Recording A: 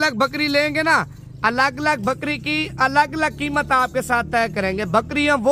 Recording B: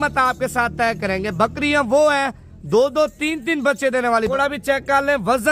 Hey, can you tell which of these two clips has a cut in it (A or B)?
B